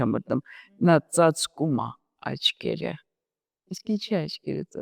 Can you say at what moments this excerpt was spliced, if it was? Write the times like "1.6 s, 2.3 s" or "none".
none